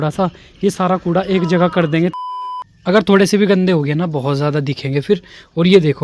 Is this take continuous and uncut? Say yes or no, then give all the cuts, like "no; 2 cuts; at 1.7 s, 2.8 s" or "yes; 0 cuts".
no; 1 cut; at 2.3 s